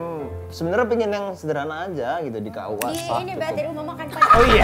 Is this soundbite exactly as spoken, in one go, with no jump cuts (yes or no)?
yes